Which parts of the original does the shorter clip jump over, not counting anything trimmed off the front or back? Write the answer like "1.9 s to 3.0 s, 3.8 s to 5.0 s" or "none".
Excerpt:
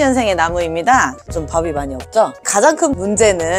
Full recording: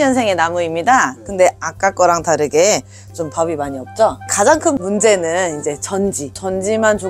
1.2 s to 3.0 s